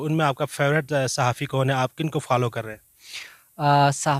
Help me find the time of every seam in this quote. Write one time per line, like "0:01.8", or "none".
none